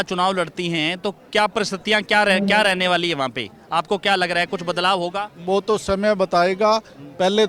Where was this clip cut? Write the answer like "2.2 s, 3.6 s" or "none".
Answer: none